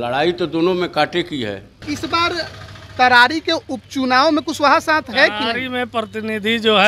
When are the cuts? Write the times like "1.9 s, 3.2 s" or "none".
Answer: 1.8 s